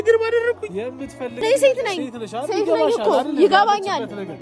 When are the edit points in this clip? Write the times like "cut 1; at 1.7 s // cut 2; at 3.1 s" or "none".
cut 1; at 1.4 s